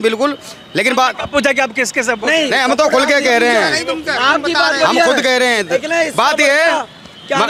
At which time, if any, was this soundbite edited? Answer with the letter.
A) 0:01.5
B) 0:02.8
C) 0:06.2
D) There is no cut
D